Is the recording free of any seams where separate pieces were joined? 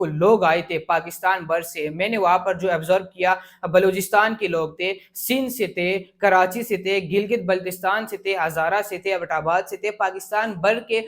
yes; 0 cuts

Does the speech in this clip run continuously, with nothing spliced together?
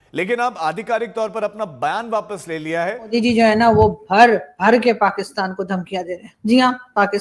no; 1 cut; at 3.1 s

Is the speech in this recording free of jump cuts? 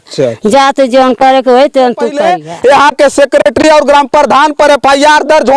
no; 1 cut; at 2.2 s

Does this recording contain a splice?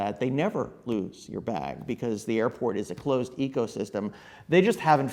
no; 0 cuts

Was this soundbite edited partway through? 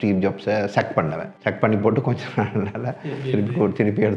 yes; 1 cut; at 1.3 s

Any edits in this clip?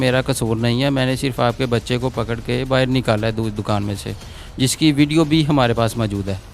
no; 0 cuts

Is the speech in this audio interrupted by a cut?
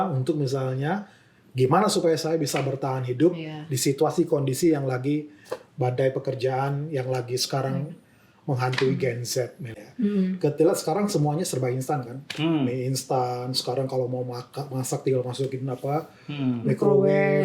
yes; 1 cut; at 9.8 s

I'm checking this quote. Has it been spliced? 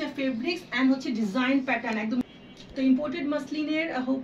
yes; 1 cut; at 2.2 s

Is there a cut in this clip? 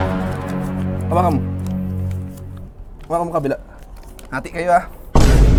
no; 0 cuts

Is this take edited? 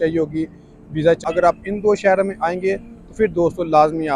yes; 1 cut; at 1.2 s

